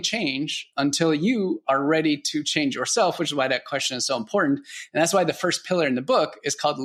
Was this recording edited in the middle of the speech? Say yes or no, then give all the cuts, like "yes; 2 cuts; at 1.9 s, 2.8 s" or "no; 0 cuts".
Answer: no; 0 cuts